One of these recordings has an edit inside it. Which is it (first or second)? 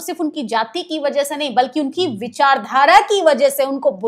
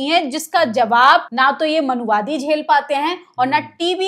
second